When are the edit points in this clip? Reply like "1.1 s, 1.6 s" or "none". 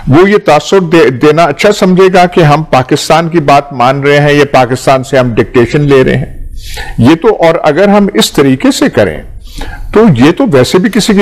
none